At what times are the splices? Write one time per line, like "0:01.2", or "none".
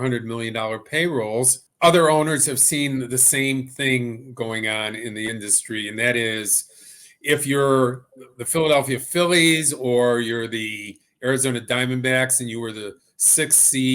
0:01.6